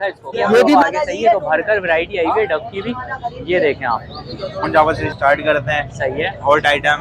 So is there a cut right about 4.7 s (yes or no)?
yes